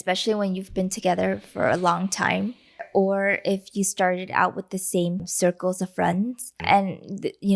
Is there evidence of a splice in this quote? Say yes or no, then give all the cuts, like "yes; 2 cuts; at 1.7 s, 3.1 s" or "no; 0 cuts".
yes; 3 cuts; at 2.8 s, 5.3 s, 6.6 s